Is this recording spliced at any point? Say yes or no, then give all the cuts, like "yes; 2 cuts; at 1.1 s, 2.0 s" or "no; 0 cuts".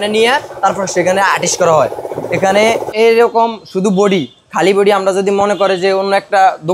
yes; 1 cut; at 2.9 s